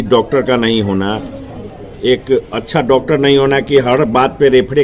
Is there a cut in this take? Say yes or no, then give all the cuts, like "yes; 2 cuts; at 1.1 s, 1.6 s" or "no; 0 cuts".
no; 0 cuts